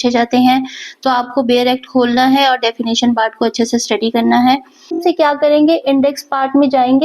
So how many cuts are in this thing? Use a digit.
1